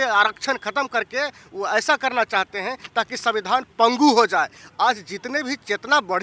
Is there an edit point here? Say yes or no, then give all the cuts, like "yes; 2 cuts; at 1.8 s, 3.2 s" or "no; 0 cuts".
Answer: no; 0 cuts